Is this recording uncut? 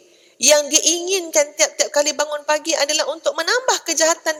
yes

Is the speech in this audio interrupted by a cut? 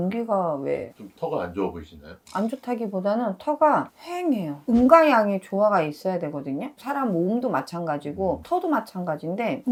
no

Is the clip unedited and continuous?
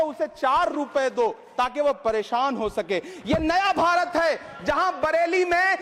yes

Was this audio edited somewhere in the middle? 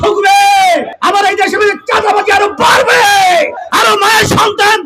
yes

